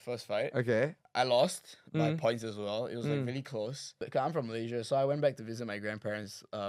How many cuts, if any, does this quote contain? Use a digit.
2